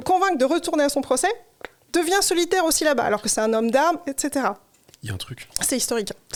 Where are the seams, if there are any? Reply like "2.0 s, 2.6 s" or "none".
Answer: none